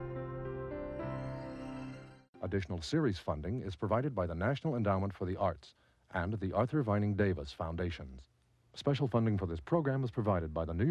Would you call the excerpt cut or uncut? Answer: cut